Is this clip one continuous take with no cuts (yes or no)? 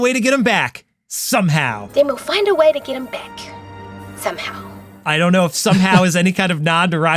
yes